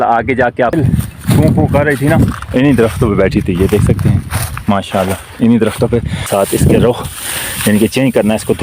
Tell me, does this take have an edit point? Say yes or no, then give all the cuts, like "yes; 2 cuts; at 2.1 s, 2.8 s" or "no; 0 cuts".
yes; 2 cuts; at 0.7 s, 6.3 s